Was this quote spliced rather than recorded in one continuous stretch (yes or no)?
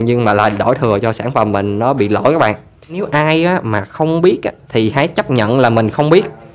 yes